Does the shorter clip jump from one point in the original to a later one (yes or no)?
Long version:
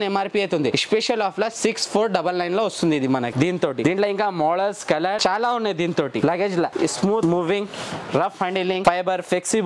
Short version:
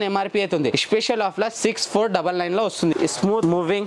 yes